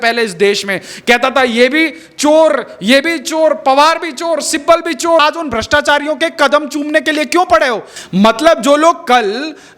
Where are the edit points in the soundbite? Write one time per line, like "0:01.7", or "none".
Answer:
0:05.2
0:07.9